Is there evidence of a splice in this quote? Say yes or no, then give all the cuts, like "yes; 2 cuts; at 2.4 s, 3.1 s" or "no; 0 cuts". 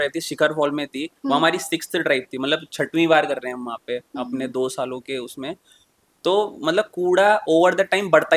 no; 0 cuts